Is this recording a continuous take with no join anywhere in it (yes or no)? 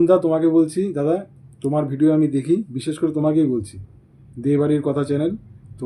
yes